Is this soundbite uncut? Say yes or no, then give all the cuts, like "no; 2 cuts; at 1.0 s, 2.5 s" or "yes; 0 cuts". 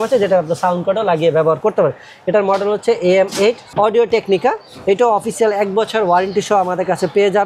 no; 1 cut; at 3.6 s